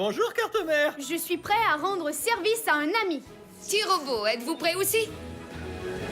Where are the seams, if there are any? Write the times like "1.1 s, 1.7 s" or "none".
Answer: 5.2 s